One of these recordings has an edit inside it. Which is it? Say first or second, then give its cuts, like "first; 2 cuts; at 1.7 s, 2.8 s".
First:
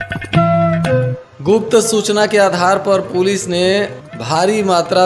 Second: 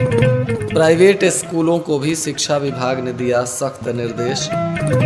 first; 1 cut; at 1.2 s